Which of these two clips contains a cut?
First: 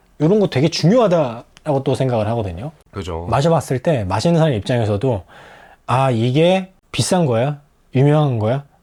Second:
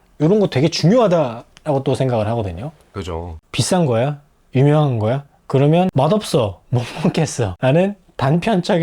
second; 3 cuts; at 3.2 s, 5.9 s, 7.5 s

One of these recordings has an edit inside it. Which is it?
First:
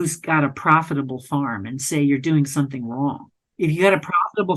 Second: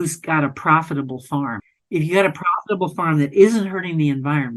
second; 1 cut; at 1.7 s

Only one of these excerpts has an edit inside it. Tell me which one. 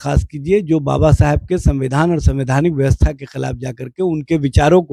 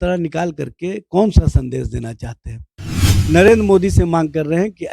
second; 1 cut; at 3.2 s

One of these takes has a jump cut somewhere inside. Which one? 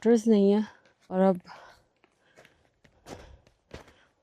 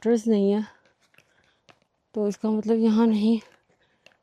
first; 1 cut; at 1.1 s

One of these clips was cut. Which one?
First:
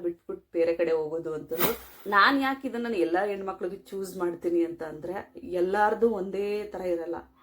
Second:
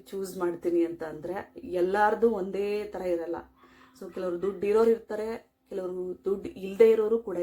first; 1 cut; at 1.9 s

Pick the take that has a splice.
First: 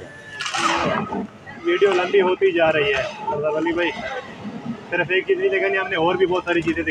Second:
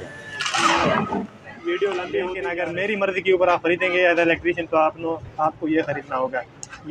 second; 1 cut; at 2.5 s

